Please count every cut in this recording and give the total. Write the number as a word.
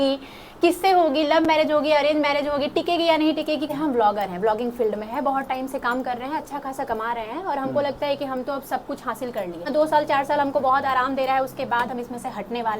two